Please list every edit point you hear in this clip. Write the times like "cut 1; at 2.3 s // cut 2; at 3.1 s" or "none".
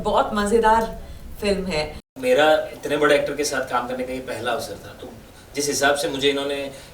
cut 1; at 2.0 s